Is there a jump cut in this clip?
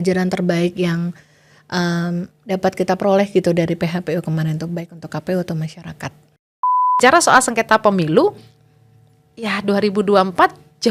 yes; 1 cut; at 6.8 s

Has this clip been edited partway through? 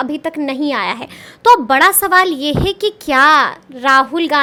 no; 0 cuts

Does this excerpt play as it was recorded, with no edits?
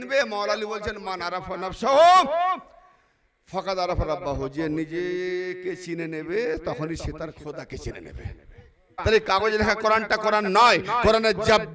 no; 1 cut; at 8.9 s

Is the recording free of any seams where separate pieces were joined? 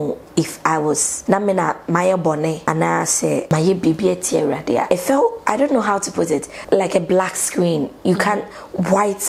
no; 5 cuts; at 1.1 s, 2.6 s, 3.5 s, 4.9 s, 6.5 s

